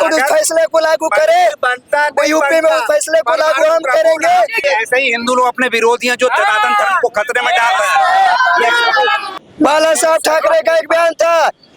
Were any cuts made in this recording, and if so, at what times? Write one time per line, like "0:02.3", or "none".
0:04.6
0:09.3